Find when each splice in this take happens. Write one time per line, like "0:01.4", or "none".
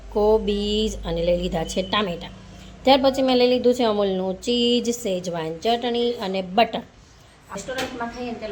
none